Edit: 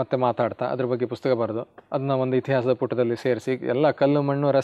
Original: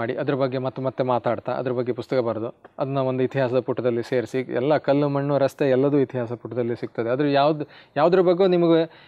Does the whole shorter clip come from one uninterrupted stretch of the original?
yes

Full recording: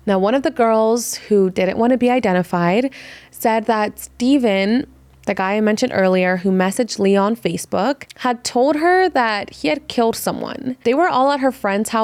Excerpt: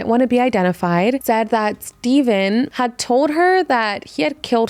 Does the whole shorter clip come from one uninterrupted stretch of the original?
no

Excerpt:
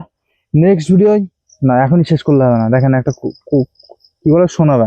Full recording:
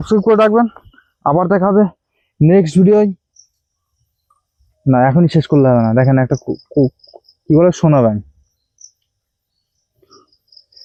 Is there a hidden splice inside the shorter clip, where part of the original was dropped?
yes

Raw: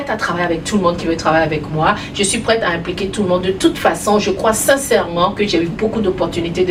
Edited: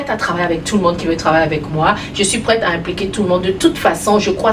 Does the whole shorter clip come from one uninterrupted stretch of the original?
yes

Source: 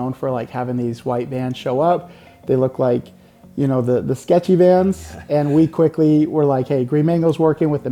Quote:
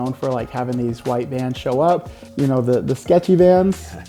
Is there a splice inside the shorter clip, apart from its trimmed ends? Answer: yes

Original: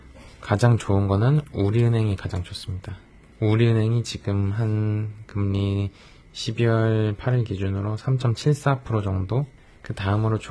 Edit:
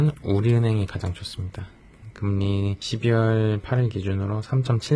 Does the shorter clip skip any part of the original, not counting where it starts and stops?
yes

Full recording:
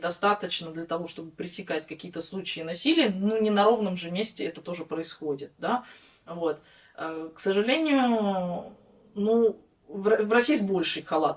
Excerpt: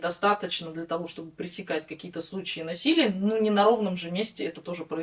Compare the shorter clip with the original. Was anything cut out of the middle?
no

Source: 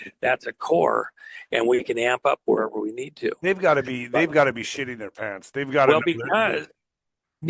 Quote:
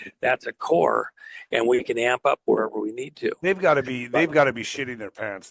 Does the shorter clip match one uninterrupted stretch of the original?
yes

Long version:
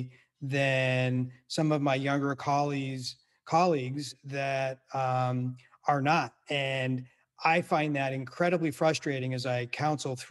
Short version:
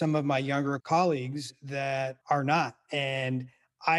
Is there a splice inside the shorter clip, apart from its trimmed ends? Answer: yes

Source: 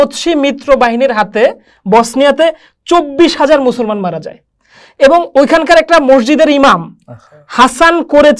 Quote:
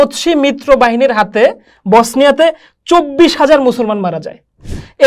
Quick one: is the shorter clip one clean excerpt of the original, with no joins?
yes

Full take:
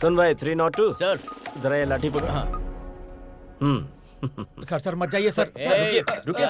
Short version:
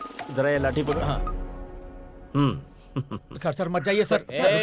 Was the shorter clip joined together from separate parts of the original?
no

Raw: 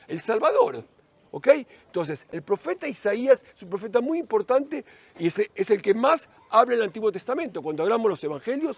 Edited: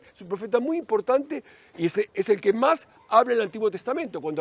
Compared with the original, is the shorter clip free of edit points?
yes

